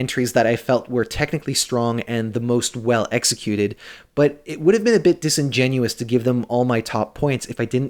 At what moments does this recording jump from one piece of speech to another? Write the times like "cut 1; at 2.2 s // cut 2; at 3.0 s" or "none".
none